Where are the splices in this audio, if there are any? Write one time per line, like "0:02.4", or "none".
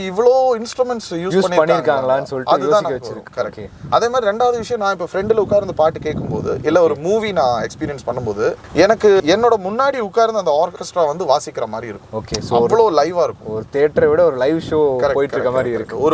none